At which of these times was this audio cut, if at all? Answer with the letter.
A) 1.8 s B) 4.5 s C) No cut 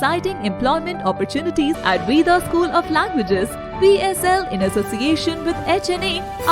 A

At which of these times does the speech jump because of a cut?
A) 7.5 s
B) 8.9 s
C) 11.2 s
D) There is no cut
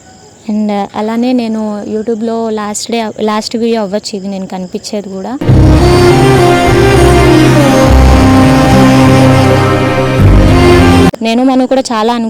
C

